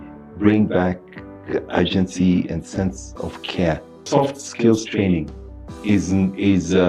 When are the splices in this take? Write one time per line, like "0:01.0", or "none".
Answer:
0:04.0